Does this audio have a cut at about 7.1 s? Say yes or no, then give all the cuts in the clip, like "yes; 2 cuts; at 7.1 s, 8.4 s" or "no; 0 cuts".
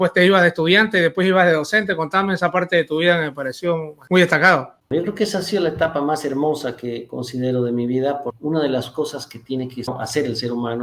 no; 4 cuts; at 3.9 s, 4.8 s, 8.3 s, 9.9 s